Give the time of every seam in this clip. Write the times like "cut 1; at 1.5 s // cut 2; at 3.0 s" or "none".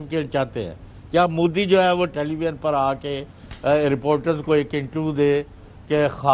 cut 1; at 2.1 s